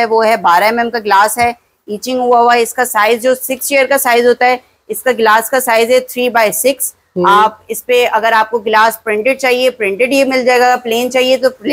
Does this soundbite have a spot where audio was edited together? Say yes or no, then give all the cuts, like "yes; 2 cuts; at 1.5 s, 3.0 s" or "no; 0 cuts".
no; 0 cuts